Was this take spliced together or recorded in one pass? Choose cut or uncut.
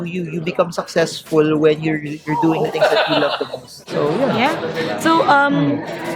uncut